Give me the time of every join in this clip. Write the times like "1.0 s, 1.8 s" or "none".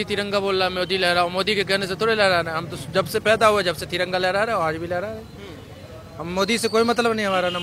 none